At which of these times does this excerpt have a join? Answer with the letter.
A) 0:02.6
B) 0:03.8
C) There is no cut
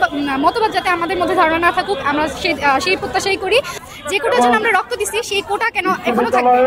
B